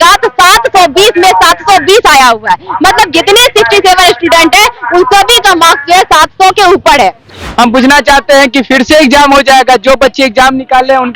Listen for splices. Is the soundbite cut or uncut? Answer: cut